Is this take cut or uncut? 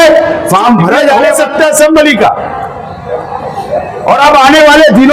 cut